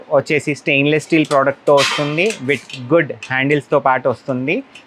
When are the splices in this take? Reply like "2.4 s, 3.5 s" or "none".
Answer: none